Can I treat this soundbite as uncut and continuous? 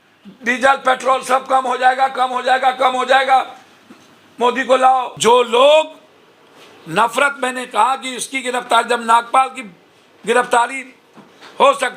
no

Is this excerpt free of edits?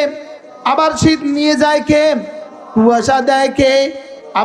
yes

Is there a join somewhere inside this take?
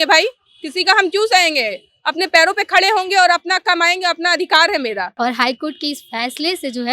yes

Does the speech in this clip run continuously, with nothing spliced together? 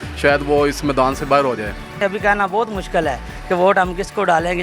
no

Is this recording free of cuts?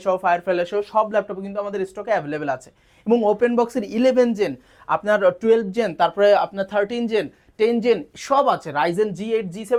yes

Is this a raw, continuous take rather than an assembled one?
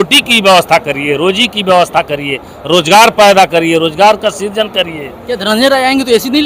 yes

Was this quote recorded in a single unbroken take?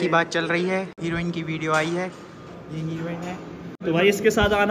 no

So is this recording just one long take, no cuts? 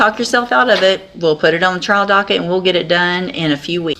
yes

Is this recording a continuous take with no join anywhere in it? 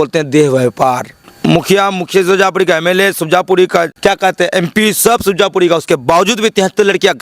no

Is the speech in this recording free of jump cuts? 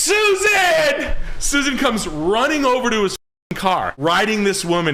no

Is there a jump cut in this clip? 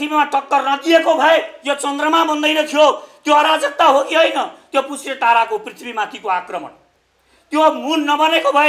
no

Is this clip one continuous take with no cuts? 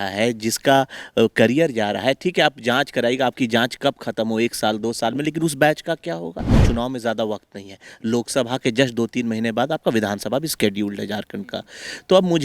no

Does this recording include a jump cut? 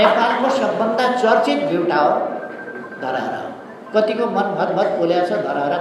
yes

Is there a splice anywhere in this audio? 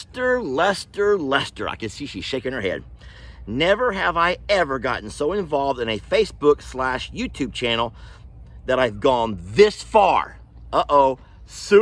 no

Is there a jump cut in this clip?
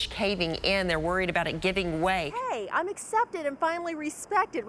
yes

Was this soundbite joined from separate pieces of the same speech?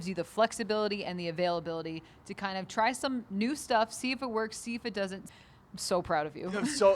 yes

